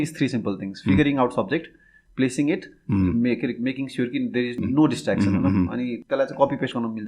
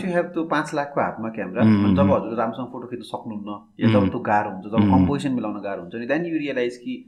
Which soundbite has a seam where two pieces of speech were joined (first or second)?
first